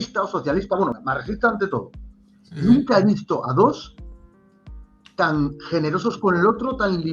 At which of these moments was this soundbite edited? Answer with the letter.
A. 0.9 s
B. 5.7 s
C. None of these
A